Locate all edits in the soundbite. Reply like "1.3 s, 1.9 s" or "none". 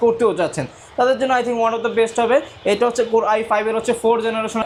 none